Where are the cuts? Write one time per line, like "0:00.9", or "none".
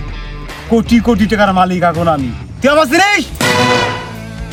none